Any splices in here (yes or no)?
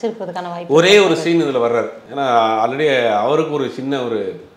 yes